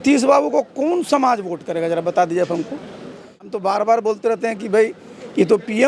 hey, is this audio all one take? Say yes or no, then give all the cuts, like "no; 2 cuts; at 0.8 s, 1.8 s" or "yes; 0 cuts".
no; 1 cut; at 3.5 s